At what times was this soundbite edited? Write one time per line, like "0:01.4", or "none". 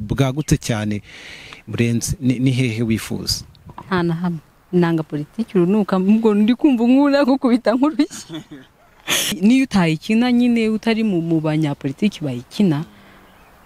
0:09.4